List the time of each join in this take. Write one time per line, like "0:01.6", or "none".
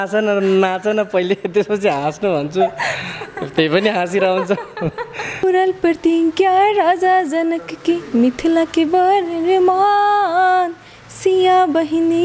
0:05.4